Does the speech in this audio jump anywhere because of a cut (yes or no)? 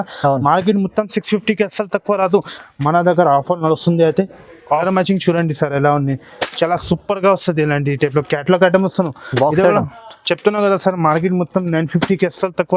yes